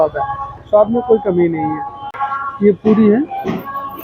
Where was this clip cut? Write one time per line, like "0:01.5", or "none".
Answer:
0:01.9